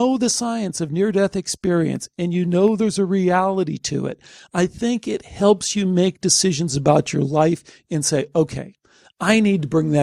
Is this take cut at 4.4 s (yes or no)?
no